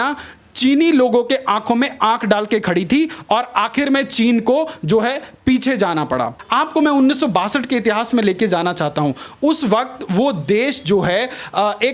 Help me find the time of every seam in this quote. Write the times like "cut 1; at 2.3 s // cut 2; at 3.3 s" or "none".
cut 1; at 6.4 s